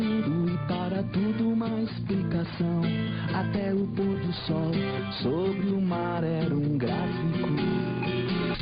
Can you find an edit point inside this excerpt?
yes; 1 cut; at 1.8 s

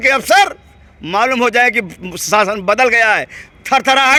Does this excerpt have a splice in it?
no; 0 cuts

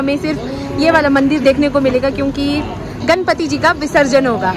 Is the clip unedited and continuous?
yes; 0 cuts

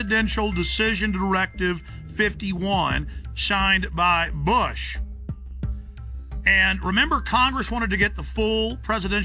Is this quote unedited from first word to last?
yes; 0 cuts

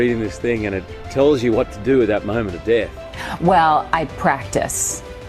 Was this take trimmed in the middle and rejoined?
yes; 1 cut; at 3.0 s

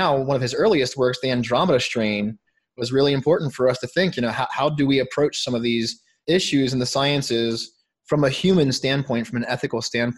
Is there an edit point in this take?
no; 0 cuts

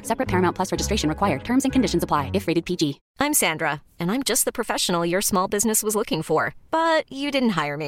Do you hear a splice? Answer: yes; 1 cut; at 3.0 s

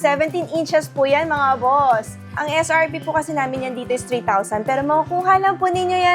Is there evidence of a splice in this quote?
yes; 1 cut; at 2.3 s

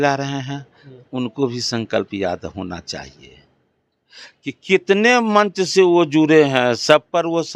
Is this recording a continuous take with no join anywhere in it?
yes; 0 cuts

